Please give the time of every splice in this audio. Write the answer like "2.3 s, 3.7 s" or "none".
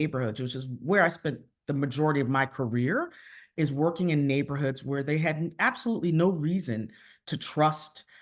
none